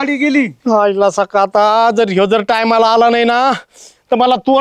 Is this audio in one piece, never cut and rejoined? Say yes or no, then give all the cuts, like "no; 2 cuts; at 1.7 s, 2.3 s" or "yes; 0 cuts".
yes; 0 cuts